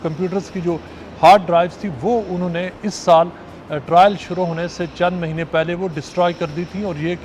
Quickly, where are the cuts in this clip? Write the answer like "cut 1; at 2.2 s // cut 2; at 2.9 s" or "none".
none